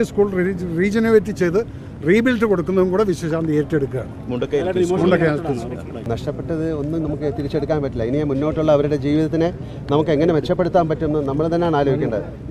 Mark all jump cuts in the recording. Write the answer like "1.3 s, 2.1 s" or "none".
6.1 s